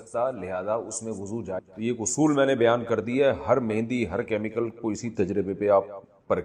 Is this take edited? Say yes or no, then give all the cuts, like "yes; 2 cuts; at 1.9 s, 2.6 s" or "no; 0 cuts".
yes; 1 cut; at 1.6 s